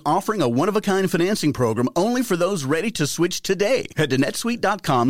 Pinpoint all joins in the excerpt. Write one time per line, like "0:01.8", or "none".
none